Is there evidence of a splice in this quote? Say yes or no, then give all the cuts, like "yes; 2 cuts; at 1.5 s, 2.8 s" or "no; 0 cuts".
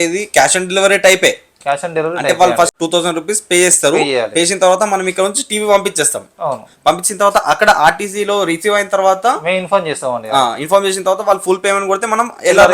yes; 1 cut; at 2.7 s